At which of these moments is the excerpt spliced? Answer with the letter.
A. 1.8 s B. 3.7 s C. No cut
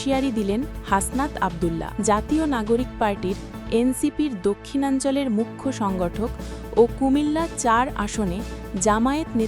A